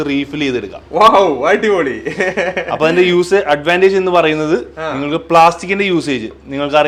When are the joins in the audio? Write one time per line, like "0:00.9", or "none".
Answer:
none